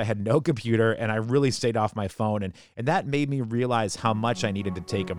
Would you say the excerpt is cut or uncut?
uncut